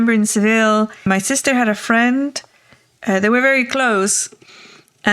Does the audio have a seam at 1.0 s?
yes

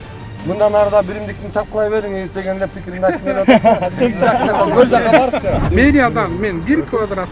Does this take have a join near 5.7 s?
yes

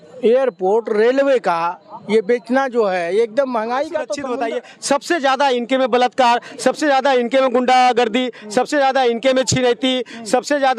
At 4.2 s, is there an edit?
yes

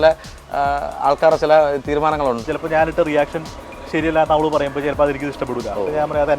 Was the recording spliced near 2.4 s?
yes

